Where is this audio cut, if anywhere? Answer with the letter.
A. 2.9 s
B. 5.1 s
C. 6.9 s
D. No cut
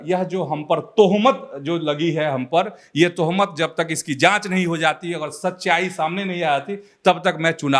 D